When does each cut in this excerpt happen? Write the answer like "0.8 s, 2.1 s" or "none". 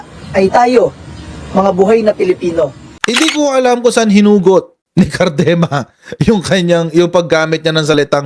3.2 s